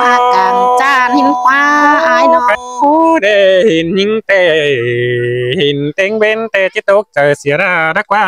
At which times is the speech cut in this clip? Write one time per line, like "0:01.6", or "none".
0:02.6